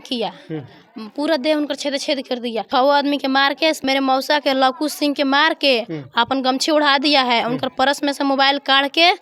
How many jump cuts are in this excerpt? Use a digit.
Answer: 2